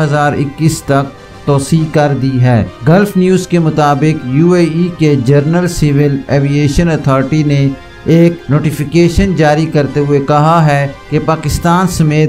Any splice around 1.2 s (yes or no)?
no